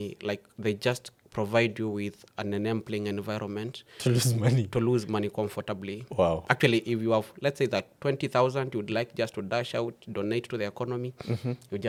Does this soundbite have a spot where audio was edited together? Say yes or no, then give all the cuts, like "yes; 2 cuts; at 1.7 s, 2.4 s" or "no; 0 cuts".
no; 0 cuts